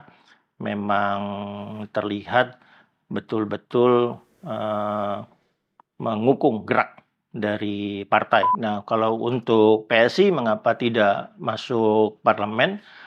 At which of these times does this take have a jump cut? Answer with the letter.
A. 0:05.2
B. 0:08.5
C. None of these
B